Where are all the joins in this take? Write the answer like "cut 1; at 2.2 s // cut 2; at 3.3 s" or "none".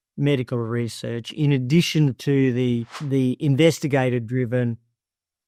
none

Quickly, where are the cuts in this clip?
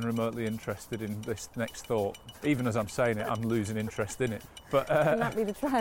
cut 1; at 2.3 s // cut 2; at 4.4 s

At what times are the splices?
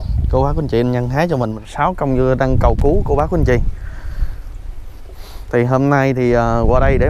cut 1; at 1.6 s

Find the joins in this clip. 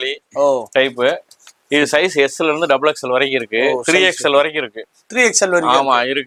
none

